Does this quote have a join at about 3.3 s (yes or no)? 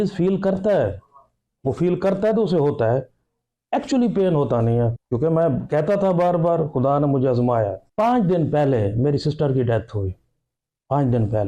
no